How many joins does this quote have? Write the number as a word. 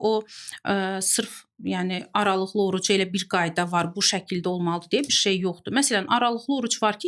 zero